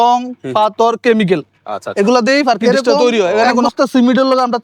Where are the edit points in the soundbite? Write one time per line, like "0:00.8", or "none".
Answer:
0:03.7